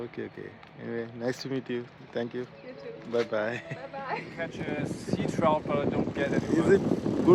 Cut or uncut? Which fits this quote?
cut